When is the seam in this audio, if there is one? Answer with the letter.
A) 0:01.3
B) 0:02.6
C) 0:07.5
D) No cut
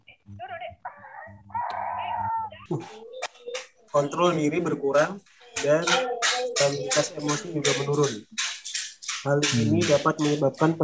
B